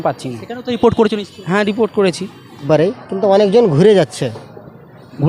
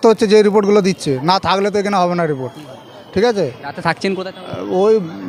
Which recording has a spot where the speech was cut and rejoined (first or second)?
first